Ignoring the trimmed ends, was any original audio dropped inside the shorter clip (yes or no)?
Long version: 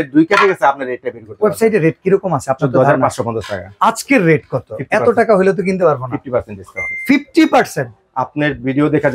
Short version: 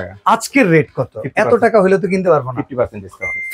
no